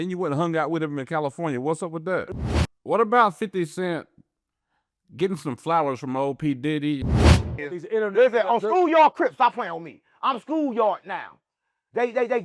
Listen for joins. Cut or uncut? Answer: cut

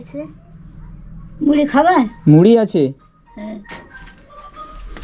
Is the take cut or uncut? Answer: uncut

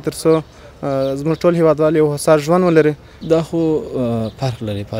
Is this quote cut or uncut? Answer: cut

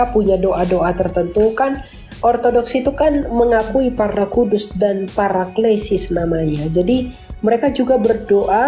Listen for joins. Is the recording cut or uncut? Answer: uncut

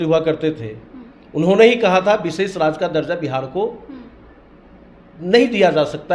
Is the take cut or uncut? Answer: uncut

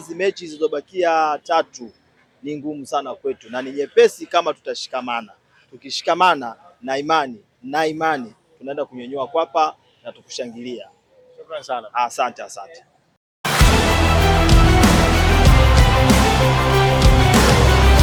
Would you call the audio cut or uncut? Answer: uncut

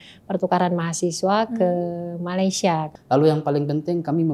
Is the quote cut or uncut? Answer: cut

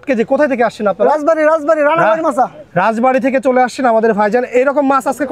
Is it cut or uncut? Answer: uncut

